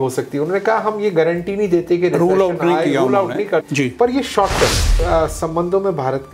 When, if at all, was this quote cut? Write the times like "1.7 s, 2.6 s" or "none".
5.0 s